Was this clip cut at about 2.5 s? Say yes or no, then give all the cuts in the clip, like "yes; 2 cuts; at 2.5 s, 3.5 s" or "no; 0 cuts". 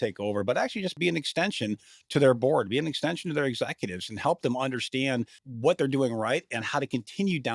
no; 2 cuts; at 1.0 s, 5.4 s